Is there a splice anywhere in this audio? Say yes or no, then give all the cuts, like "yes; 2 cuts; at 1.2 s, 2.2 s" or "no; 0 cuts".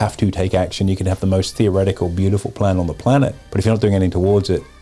yes; 1 cut; at 3.4 s